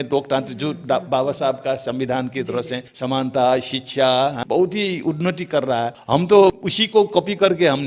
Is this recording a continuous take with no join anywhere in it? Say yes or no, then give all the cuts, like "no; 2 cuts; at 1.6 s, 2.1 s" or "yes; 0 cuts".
no; 4 cuts; at 2.8 s, 4.4 s, 6.0 s, 6.7 s